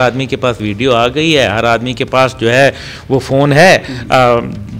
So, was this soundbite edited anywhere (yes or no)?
no